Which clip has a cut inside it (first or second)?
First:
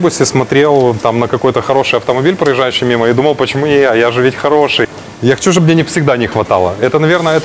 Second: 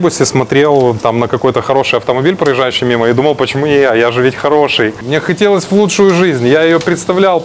first